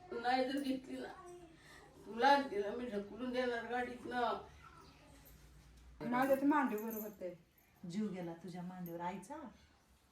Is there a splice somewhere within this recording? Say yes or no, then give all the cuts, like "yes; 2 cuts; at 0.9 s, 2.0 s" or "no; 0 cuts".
yes; 1 cut; at 6.0 s